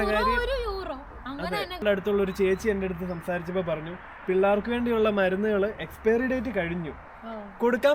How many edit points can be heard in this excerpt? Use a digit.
1